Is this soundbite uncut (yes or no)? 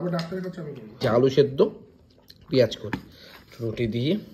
no